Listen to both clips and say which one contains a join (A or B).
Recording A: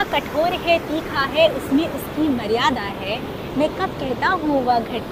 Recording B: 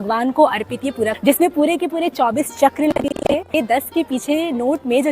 B